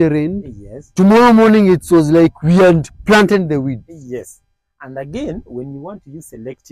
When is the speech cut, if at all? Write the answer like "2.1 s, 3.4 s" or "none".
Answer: none